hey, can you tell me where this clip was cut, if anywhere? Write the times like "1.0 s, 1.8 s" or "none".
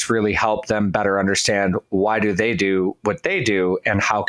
none